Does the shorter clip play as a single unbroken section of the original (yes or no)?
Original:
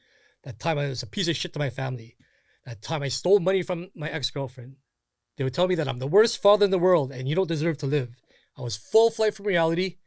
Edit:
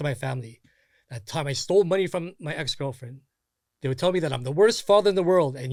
yes